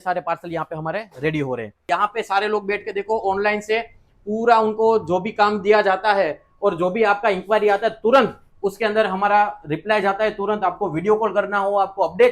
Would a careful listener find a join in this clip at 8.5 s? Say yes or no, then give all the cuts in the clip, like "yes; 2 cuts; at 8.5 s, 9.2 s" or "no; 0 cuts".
no; 1 cut; at 1.8 s